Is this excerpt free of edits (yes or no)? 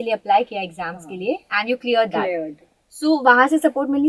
yes